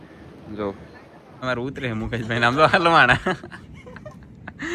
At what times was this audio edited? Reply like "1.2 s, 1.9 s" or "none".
1.4 s